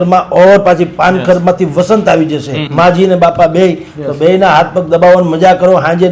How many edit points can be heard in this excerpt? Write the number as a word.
one